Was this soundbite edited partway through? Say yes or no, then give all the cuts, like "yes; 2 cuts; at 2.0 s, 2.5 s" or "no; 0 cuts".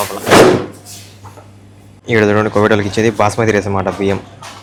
no; 0 cuts